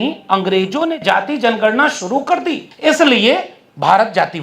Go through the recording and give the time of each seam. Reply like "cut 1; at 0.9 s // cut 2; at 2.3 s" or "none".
cut 1; at 2.7 s